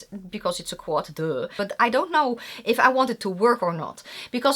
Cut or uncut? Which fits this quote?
cut